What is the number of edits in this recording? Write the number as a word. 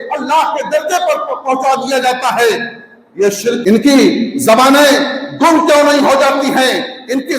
one